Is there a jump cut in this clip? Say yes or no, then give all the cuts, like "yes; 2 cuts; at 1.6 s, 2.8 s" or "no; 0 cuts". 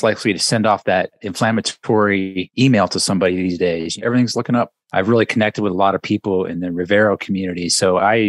yes; 4 cuts; at 1.2 s, 2.5 s, 4.0 s, 4.8 s